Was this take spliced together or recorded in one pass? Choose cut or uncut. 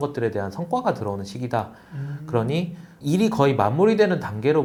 uncut